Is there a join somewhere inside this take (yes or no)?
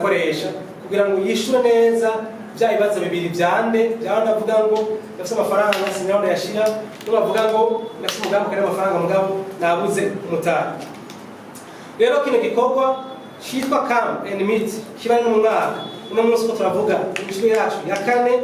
no